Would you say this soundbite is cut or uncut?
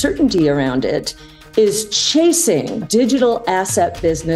cut